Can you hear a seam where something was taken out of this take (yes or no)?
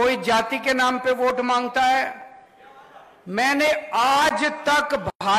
no